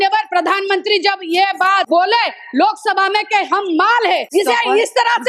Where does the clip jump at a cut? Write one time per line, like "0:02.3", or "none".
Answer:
0:01.8
0:04.3